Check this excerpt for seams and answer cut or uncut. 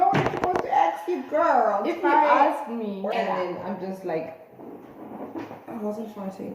cut